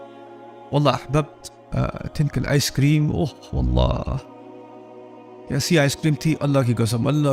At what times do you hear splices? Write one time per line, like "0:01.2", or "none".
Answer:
none